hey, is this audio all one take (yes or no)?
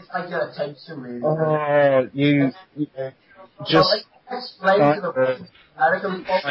no